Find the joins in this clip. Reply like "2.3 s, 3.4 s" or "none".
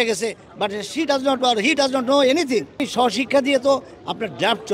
2.9 s